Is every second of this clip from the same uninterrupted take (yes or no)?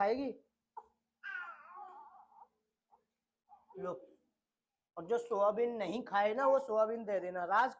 yes